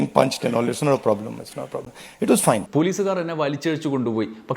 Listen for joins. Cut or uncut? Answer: cut